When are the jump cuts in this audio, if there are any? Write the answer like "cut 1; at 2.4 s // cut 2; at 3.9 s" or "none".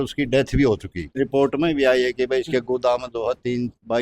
cut 1; at 1.2 s

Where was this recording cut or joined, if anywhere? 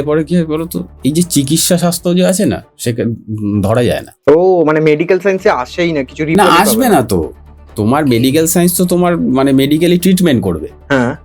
cut 1; at 4.1 s

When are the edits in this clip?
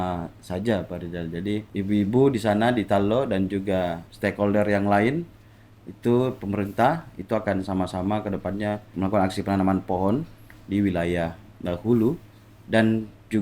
cut 1; at 1.7 s // cut 2; at 4.0 s // cut 3; at 8.9 s

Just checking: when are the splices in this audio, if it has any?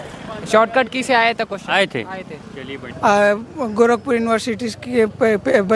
cut 1; at 2.8 s

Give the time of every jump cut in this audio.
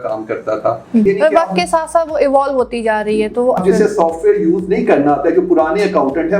cut 1; at 1.1 s // cut 2; at 3.6 s

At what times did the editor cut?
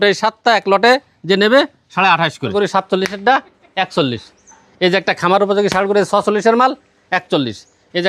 cut 1; at 2.5 s

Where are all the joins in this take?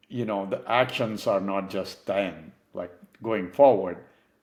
none

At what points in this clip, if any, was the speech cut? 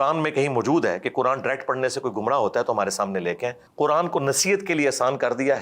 cut 1; at 3.6 s

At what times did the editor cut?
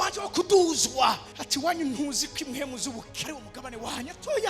cut 1; at 3.2 s

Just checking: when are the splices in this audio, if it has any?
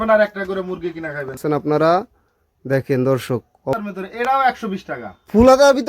cut 1; at 1.4 s // cut 2; at 3.7 s

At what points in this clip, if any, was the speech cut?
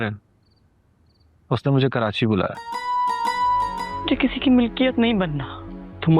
cut 1; at 3.8 s

